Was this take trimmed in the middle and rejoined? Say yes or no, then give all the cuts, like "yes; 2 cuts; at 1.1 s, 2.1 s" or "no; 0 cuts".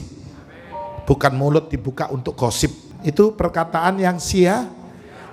yes; 1 cut; at 2.9 s